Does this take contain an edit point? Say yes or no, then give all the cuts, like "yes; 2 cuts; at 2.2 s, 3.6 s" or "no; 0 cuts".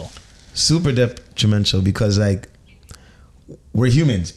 no; 0 cuts